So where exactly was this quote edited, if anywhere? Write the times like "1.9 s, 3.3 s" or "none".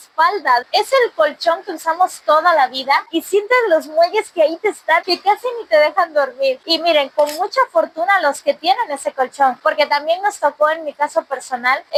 none